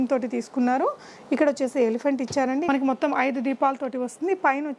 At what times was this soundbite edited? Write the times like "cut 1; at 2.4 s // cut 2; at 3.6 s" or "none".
cut 1; at 2.7 s